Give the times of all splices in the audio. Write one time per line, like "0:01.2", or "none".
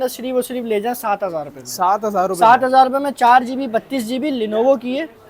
none